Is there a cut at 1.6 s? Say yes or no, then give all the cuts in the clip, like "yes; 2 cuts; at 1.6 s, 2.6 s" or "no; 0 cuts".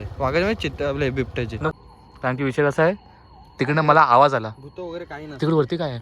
yes; 1 cut; at 1.6 s